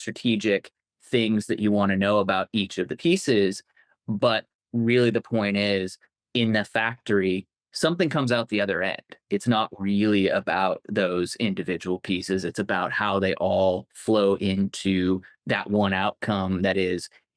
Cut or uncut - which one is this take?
uncut